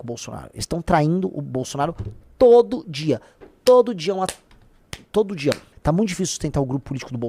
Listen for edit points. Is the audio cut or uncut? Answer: cut